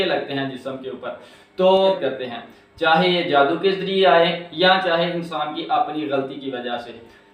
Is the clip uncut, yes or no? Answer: no